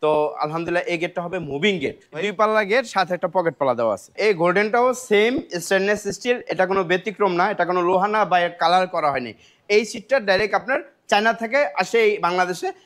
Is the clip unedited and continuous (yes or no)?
no